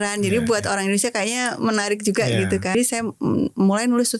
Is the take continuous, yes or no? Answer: no